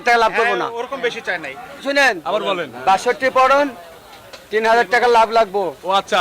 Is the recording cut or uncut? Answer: cut